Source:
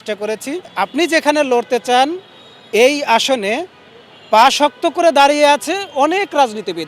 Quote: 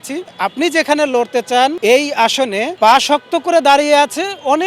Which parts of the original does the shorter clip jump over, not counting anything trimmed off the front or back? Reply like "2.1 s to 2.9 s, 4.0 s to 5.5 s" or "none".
2.1 s to 2.7 s, 3.6 s to 4.2 s